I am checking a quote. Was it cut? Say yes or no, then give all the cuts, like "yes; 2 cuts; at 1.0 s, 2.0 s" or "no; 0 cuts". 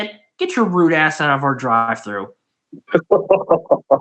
no; 0 cuts